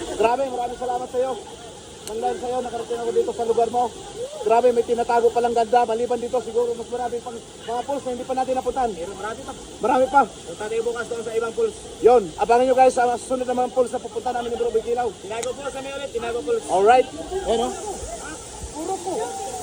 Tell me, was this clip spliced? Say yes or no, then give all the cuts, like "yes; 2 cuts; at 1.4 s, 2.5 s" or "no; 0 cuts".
no; 0 cuts